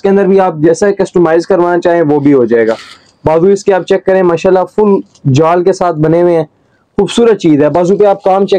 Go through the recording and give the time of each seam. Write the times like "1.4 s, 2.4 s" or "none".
none